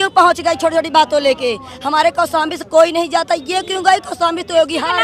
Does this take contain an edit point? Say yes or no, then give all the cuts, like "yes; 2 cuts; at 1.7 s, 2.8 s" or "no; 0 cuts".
no; 0 cuts